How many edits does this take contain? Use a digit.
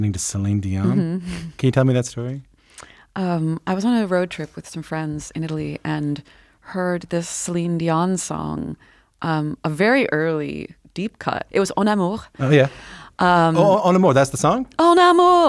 0